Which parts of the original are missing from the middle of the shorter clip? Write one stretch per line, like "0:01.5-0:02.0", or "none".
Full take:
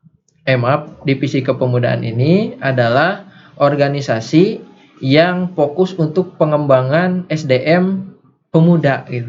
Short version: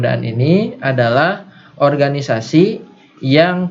none